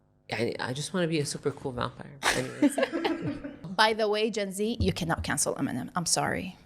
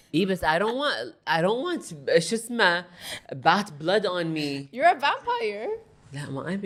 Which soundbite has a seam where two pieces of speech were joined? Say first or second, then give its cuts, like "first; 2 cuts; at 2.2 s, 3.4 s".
first; 1 cut; at 3.7 s